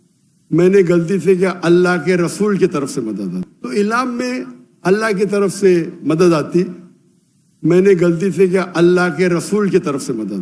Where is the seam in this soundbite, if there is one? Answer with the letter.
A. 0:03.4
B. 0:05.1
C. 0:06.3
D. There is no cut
A